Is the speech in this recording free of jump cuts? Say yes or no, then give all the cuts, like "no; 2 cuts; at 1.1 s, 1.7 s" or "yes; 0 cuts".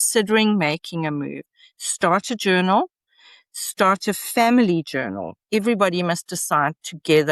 yes; 0 cuts